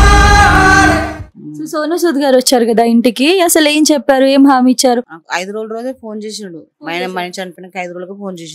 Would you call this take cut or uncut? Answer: cut